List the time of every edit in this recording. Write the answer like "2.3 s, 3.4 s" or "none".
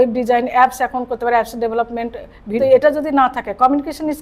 2.6 s

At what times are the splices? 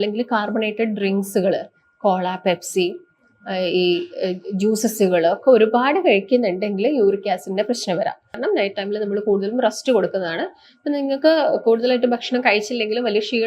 8.3 s

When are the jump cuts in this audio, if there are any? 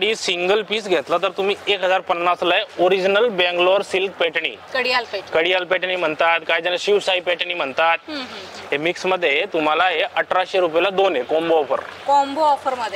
none

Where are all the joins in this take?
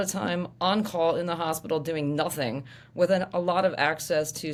none

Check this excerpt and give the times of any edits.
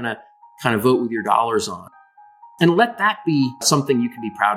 2.1 s, 3.6 s

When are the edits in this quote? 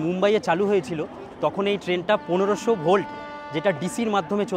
none

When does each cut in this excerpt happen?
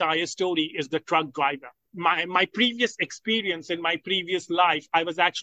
1.8 s

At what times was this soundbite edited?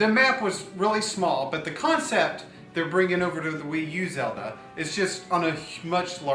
4.1 s

